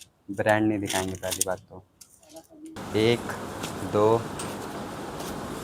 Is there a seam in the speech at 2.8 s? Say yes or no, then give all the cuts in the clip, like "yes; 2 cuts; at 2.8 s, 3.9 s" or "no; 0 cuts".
yes; 1 cut; at 2.8 s